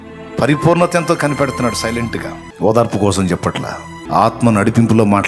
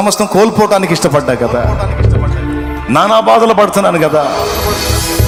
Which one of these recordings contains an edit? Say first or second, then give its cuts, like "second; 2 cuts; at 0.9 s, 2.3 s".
first; 2 cuts; at 2.4 s, 3.9 s